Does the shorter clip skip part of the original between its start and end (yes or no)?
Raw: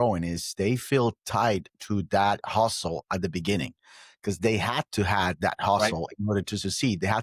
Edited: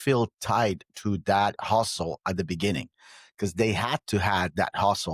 no